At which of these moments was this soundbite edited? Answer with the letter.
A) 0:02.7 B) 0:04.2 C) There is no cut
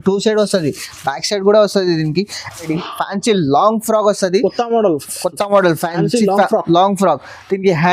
A